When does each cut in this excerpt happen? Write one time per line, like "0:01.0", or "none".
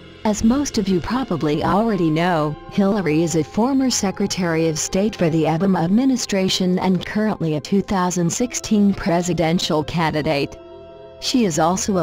none